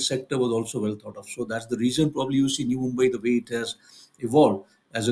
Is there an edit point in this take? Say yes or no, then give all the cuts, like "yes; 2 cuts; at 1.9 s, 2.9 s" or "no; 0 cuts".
no; 0 cuts